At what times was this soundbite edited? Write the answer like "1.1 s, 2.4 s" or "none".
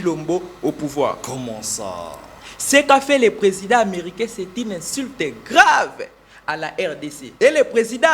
7.2 s